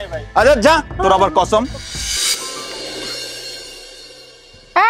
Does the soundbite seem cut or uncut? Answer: cut